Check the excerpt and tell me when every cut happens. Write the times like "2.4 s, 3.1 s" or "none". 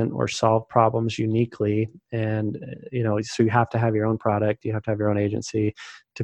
none